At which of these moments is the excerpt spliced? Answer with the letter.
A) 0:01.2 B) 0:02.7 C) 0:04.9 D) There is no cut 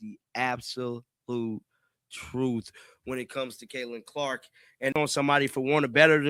C